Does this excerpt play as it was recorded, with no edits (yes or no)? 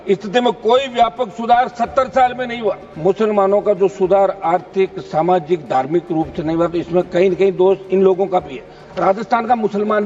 no